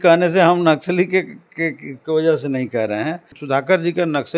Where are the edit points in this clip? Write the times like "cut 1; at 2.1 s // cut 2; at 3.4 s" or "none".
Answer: cut 1; at 3.3 s